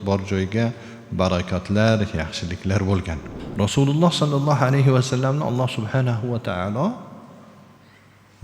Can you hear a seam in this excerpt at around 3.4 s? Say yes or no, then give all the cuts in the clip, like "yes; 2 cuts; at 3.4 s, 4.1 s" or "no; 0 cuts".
yes; 1 cut; at 3.4 s